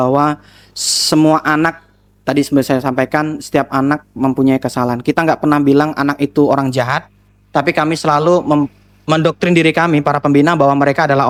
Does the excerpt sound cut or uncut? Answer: uncut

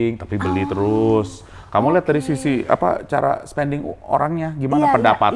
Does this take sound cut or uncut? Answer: uncut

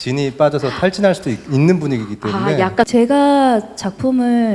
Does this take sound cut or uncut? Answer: cut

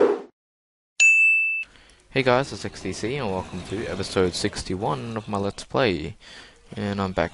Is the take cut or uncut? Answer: uncut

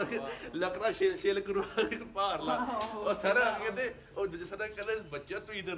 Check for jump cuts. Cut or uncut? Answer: uncut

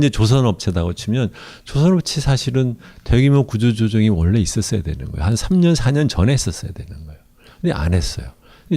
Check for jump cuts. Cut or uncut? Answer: cut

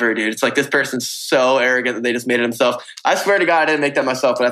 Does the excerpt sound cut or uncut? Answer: uncut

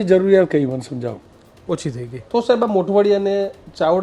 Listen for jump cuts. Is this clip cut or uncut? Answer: uncut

